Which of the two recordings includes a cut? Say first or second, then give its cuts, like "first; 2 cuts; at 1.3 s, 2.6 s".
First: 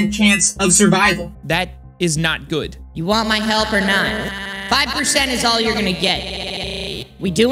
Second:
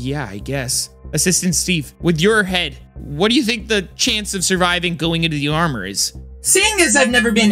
second; 2 cuts; at 1.9 s, 6.3 s